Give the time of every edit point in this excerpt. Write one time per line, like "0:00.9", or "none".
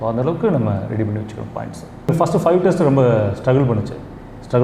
0:02.1